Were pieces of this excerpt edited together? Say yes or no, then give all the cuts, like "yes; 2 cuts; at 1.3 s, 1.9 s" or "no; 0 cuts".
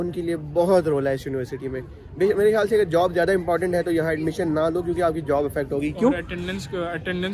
no; 0 cuts